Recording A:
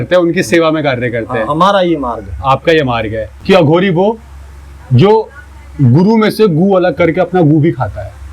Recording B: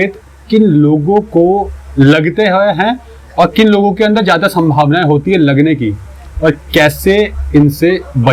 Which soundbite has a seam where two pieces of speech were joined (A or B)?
A